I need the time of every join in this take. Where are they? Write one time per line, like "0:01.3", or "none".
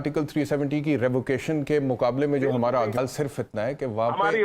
0:03.0